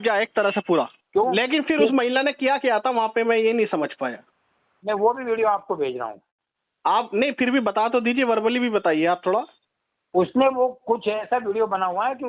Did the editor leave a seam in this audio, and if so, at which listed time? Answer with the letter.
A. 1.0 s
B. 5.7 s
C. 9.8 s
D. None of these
A